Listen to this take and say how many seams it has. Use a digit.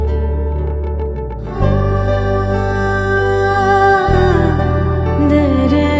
1